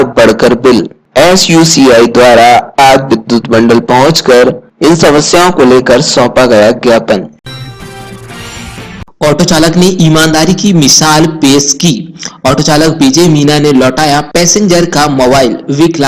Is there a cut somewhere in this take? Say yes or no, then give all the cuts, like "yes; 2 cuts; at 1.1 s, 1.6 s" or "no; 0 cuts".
yes; 1 cut; at 7.4 s